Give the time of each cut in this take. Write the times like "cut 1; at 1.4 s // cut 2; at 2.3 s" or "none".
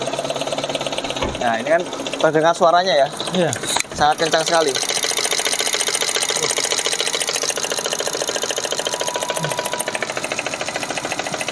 none